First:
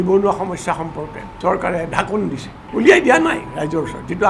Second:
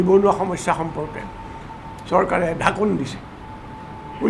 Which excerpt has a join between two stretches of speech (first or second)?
first